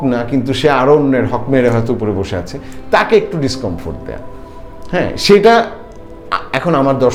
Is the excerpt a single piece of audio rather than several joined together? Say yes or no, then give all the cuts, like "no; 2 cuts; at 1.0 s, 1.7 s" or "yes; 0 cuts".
yes; 0 cuts